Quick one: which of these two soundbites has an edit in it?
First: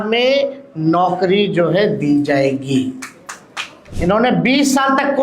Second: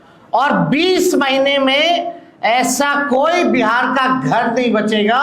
first; 1 cut; at 3.8 s

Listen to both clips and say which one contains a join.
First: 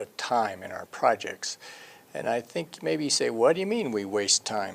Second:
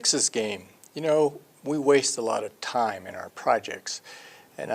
second; 1 cut; at 1.3 s

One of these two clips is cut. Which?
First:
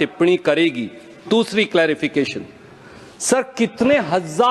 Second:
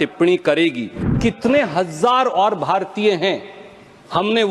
second; 1 cut; at 1.1 s

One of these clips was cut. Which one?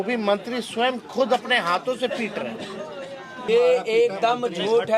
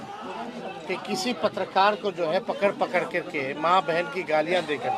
first; 1 cut; at 3.5 s

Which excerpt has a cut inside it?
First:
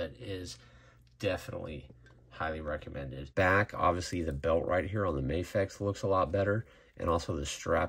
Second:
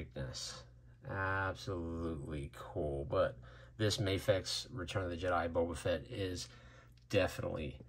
first; 1 cut; at 3.3 s

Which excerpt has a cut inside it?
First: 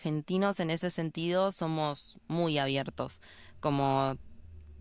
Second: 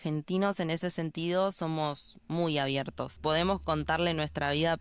second; 1 cut; at 3.0 s

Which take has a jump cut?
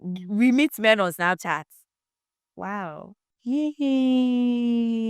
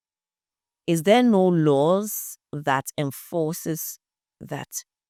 first; 1 cut; at 3.1 s

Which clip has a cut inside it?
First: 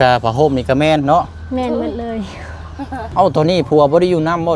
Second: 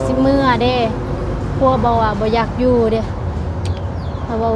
first; 1 cut; at 3.1 s

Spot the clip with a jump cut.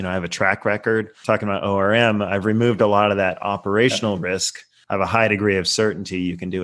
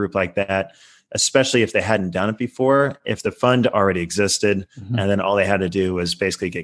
first; 2 cuts; at 1.2 s, 4.7 s

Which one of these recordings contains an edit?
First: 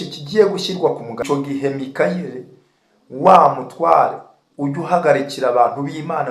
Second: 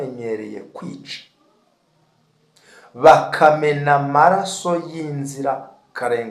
first; 1 cut; at 1.2 s

